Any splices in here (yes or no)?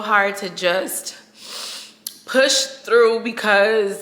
no